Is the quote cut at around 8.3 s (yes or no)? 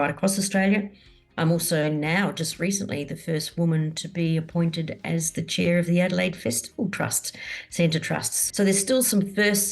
yes